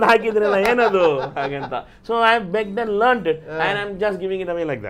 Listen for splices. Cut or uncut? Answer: uncut